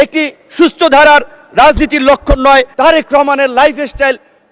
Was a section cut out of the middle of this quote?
yes; 1 cut; at 2.7 s

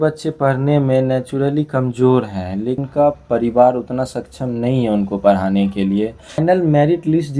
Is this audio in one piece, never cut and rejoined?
no; 2 cuts; at 2.8 s, 6.4 s

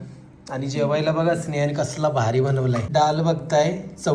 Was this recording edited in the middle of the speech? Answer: yes; 1 cut; at 2.9 s

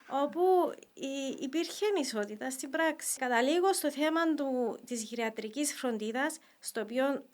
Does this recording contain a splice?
yes; 1 cut; at 3.1 s

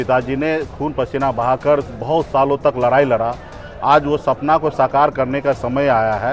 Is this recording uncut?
yes; 0 cuts

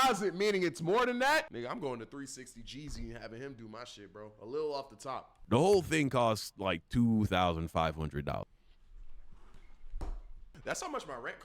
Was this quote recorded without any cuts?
no; 3 cuts; at 1.5 s, 5.3 s, 10.3 s

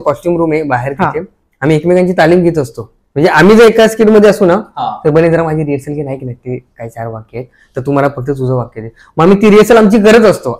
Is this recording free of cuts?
yes; 0 cuts

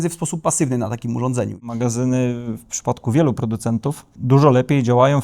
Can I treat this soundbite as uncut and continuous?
no; 2 cuts; at 1.6 s, 4.1 s

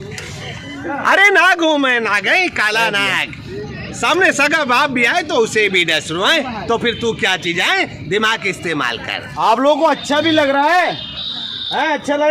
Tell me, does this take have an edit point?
no; 0 cuts

